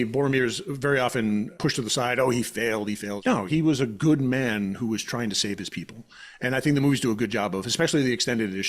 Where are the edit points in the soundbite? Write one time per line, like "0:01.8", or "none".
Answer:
0:01.5
0:03.5